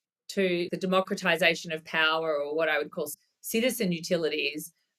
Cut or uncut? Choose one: cut